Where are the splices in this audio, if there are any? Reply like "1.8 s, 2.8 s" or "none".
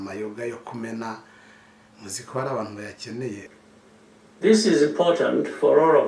3.6 s